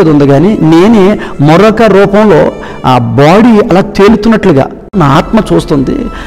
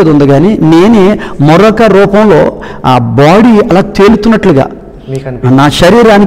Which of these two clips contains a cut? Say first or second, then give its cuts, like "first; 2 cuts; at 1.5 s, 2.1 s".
first; 1 cut; at 5.0 s